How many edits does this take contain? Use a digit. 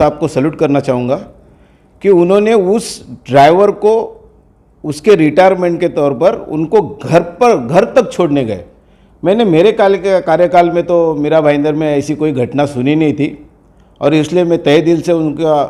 0